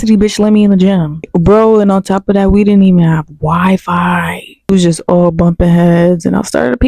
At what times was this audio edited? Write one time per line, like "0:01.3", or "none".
0:01.3
0:04.7